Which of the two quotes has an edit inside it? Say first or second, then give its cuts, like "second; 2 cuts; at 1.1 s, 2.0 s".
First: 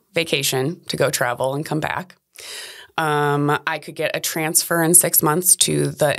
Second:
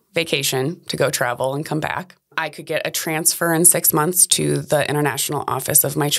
second; 1 cut; at 2.5 s